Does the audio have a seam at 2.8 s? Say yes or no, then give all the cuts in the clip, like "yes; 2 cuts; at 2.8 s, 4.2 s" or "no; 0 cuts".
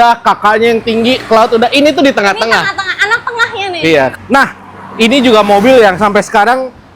no; 1 cut; at 4.1 s